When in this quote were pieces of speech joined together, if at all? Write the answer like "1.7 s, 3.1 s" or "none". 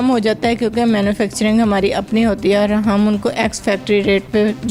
none